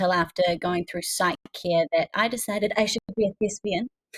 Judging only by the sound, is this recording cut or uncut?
uncut